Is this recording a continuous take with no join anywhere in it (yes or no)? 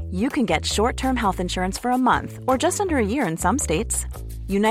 yes